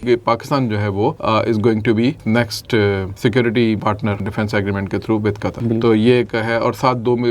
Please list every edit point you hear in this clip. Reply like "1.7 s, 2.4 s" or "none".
1.2 s, 2.2 s, 3.1 s, 3.9 s, 5.6 s